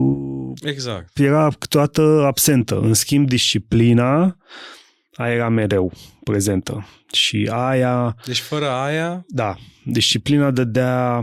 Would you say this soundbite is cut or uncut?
uncut